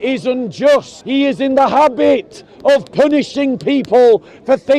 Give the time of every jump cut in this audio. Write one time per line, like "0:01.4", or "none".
0:01.0

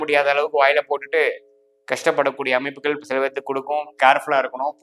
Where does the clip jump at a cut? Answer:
0:03.9

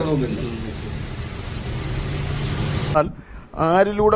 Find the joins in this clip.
0:03.0

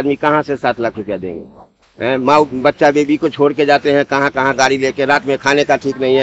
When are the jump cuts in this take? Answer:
none

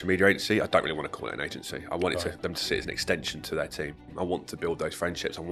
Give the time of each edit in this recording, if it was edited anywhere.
0:04.0

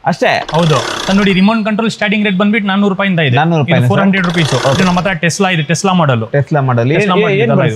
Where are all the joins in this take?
0:00.9
0:04.8

